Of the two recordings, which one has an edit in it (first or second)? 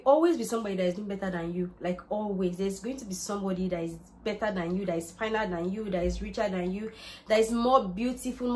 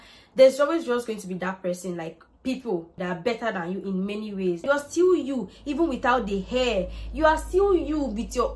second